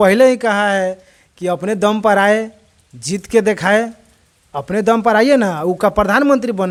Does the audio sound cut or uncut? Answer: uncut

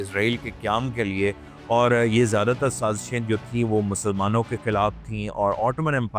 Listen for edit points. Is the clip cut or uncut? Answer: uncut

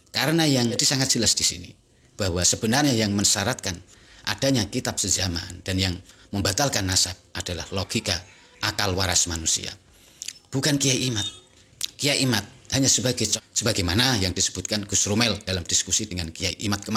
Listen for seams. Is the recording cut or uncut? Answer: cut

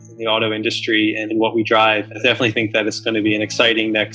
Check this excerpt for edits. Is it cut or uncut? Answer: cut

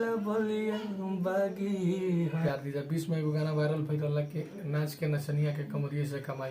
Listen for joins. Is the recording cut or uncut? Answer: cut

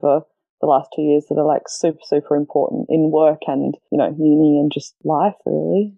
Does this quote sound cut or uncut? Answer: cut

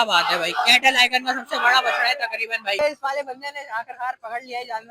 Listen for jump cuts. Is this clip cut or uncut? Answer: cut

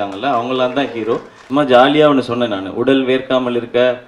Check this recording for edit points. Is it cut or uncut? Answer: cut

